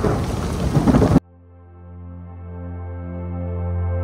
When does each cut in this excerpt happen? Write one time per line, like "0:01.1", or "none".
0:01.2